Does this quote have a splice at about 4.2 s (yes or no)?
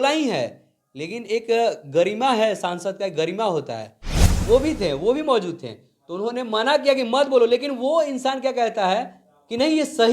yes